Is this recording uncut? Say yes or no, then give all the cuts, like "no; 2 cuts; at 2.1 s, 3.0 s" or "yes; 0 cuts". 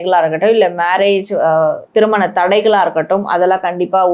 no; 1 cut; at 1.8 s